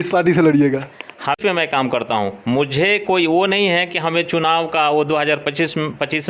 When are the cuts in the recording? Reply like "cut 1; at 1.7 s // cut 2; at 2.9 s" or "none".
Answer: cut 1; at 1.4 s